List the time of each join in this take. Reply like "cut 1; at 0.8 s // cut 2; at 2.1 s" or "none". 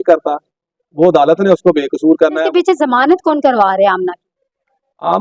cut 1; at 2.5 s